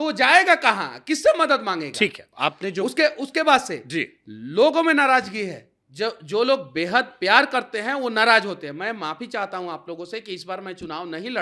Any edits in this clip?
no; 0 cuts

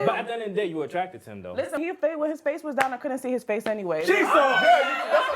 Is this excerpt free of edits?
no; 1 cut; at 1.8 s

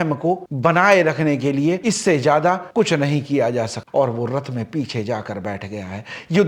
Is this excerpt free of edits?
no; 1 cut; at 3.8 s

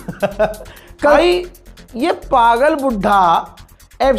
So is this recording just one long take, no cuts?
no; 1 cut; at 1.2 s

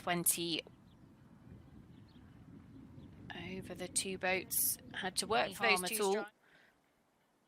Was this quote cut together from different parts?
yes; 1 cut; at 5.8 s

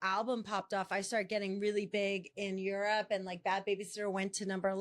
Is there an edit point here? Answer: no; 0 cuts

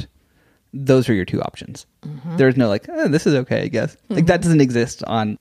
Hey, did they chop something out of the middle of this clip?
no; 0 cuts

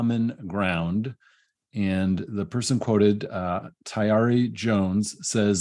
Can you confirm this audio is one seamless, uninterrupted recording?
yes; 0 cuts

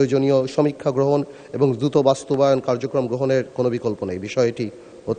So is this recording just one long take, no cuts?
yes; 0 cuts

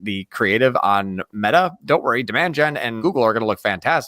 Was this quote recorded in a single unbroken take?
no; 1 cut; at 2.9 s

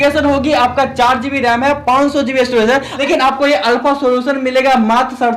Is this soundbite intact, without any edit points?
no; 1 cut; at 2.9 s

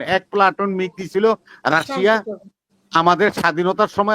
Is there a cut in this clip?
no; 0 cuts

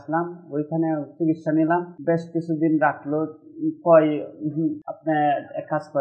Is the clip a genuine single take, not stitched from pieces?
no; 2 cuts; at 1.9 s, 4.9 s

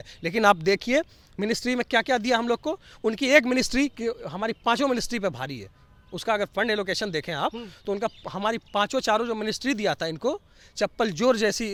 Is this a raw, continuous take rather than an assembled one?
yes; 0 cuts

